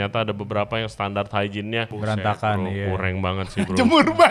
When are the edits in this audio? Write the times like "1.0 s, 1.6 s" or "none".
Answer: 1.9 s